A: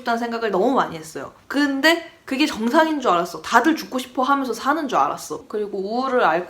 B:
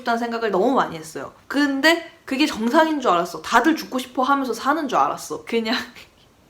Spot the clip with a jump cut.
A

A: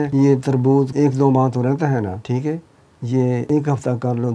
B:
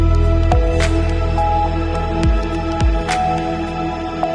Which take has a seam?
A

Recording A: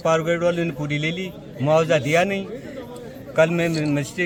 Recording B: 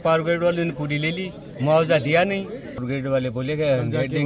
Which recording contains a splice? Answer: B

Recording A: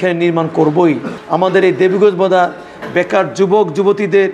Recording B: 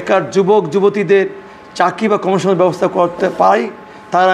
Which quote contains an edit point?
A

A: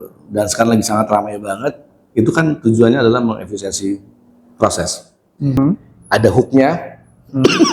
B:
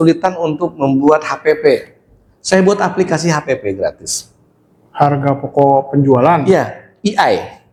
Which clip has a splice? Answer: A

